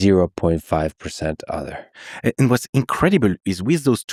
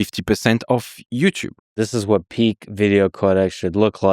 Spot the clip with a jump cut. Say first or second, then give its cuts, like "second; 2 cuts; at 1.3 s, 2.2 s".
second; 1 cut; at 1.7 s